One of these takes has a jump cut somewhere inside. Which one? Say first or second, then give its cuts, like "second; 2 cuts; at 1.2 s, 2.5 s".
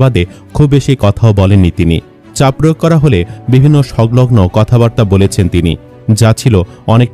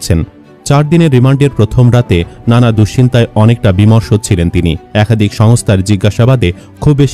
second; 1 cut; at 4.8 s